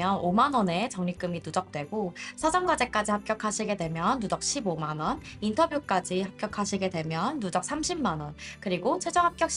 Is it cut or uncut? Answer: uncut